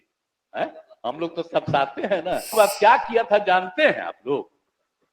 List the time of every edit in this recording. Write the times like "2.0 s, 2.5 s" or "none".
2.5 s